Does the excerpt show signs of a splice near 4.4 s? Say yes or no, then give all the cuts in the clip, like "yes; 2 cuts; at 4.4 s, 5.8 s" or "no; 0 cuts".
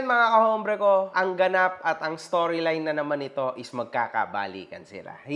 no; 1 cut; at 1.1 s